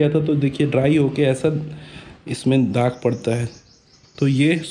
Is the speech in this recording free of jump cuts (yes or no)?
yes